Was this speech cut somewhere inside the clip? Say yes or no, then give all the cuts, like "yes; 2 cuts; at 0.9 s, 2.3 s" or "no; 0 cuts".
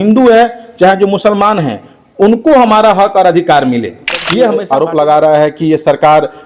yes; 1 cut; at 4.2 s